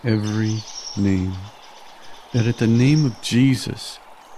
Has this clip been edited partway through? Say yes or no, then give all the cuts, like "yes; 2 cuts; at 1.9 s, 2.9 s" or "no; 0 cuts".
no; 0 cuts